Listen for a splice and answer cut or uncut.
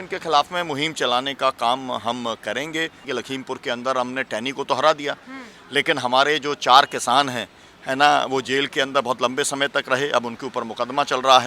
cut